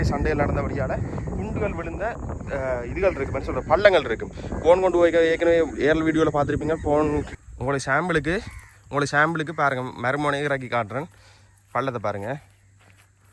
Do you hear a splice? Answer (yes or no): yes